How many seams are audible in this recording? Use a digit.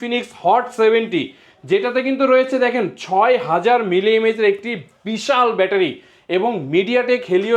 0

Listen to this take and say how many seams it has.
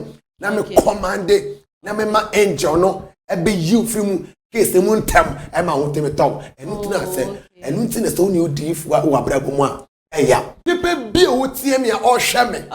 1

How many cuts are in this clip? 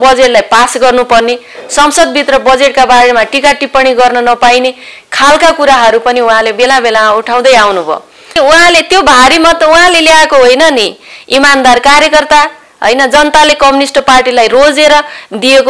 1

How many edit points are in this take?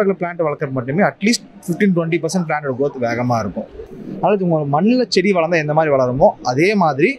1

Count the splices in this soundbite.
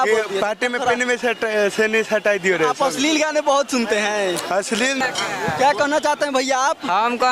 1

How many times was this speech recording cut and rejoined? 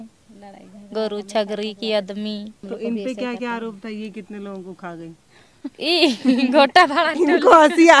1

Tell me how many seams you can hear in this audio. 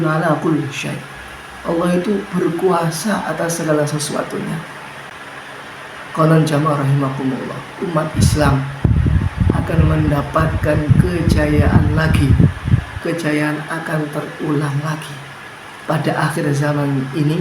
1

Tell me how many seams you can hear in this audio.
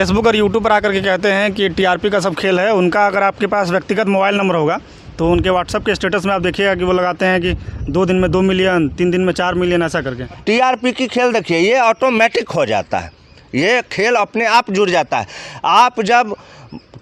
1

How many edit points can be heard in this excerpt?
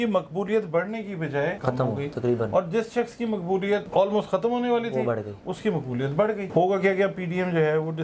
3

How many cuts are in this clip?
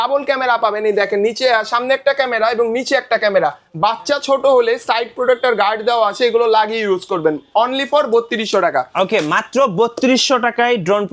0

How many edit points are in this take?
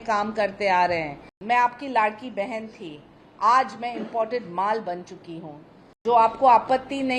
2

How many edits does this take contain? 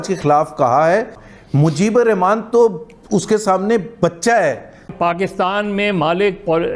2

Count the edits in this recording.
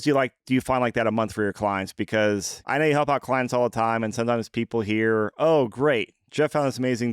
1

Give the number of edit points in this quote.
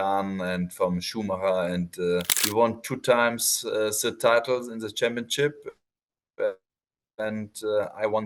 1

